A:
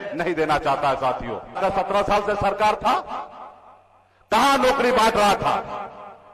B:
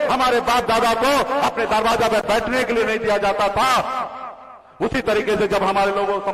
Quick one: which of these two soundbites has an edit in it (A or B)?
A